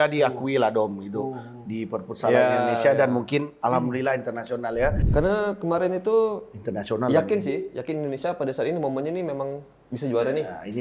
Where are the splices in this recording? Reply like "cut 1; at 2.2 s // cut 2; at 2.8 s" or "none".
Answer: cut 1; at 5.0 s